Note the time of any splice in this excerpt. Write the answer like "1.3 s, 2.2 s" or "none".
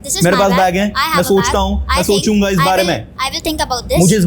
none